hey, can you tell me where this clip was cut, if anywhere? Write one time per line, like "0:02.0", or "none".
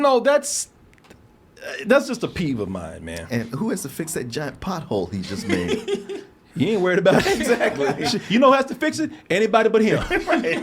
none